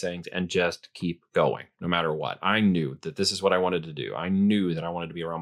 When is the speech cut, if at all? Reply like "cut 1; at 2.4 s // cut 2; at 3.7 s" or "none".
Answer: none